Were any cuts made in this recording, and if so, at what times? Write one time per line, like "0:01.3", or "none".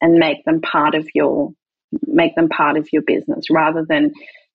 none